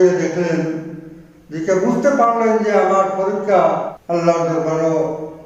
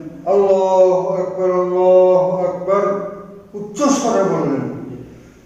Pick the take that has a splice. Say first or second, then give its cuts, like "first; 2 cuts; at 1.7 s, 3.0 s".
first; 1 cut; at 4.0 s